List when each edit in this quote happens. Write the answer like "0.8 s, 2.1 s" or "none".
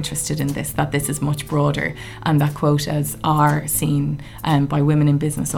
none